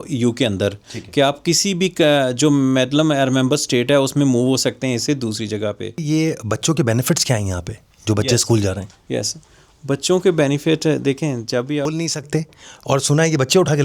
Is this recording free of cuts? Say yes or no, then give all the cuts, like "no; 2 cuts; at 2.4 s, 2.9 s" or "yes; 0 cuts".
no; 2 cuts; at 6.0 s, 11.9 s